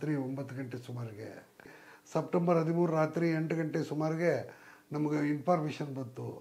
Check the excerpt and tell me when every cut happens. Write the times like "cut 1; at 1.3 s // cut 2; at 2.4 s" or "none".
cut 1; at 1.7 s

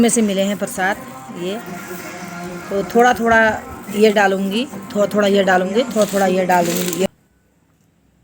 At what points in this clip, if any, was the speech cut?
cut 1; at 7.1 s

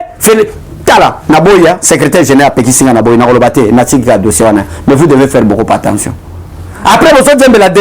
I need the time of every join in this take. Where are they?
none

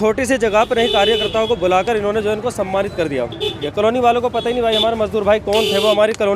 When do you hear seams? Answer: cut 1; at 3.6 s

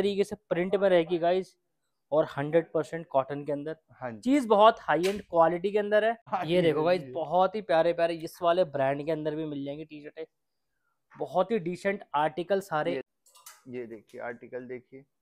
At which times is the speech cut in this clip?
cut 1; at 6.2 s // cut 2; at 13.1 s

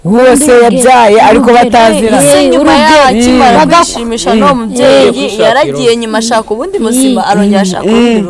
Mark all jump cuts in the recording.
none

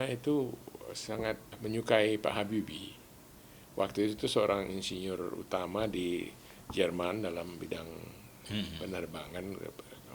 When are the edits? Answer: cut 1; at 1.5 s

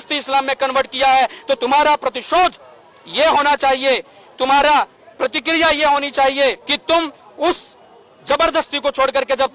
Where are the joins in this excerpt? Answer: cut 1; at 6.7 s

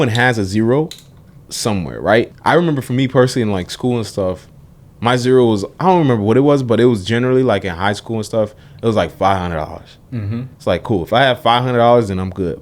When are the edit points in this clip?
cut 1; at 2.3 s

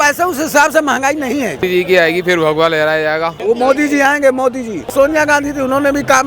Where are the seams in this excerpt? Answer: cut 1; at 1.6 s // cut 2; at 3.3 s // cut 3; at 4.9 s

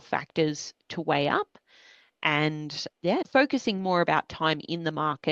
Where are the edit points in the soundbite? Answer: cut 1; at 3.3 s

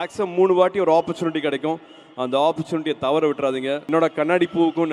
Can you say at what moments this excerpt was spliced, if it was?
cut 1; at 3.8 s

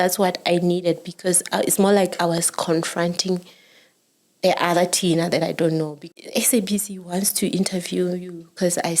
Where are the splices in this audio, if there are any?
cut 1; at 6.0 s

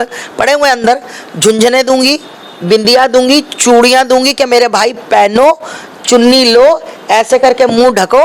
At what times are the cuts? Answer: none

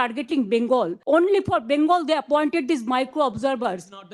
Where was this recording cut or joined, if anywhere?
cut 1; at 1.0 s

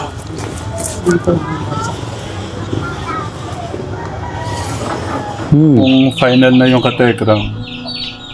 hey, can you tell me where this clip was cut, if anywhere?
cut 1; at 5.8 s

